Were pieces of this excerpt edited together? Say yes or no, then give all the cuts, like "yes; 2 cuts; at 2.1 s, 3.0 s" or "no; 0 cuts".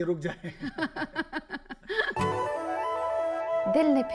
yes; 1 cut; at 2.2 s